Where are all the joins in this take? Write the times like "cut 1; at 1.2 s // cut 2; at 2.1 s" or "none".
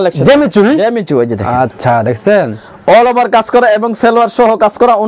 none